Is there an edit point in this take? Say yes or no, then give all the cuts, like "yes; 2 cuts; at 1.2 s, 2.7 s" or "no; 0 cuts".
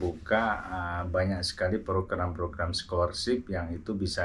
no; 0 cuts